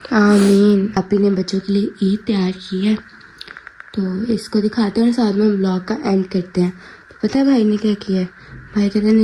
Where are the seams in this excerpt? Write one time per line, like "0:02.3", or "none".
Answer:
0:00.9